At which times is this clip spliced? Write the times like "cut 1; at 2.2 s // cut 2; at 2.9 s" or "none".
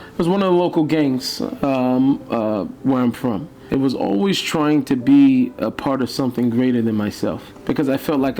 cut 1; at 3.5 s // cut 2; at 7.5 s